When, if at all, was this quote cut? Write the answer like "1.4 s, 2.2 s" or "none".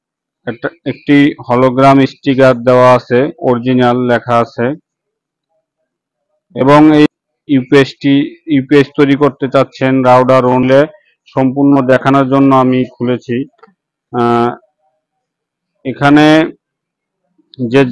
7.1 s, 10.6 s